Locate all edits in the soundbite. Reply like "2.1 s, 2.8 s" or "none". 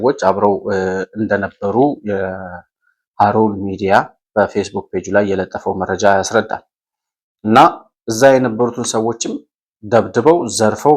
none